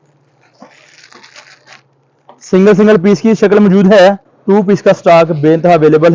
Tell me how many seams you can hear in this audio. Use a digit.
1